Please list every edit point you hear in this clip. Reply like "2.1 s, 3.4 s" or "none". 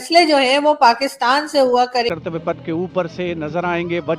2.1 s